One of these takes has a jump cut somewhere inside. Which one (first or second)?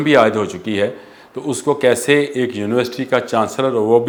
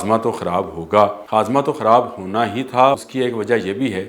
second